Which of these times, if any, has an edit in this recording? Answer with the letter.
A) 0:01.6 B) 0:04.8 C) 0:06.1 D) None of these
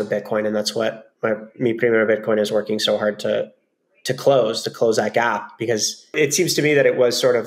C